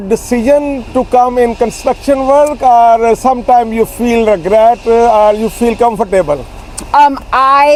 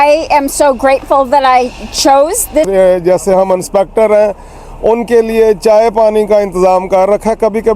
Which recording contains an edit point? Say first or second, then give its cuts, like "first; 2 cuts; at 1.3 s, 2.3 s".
second; 1 cut; at 2.7 s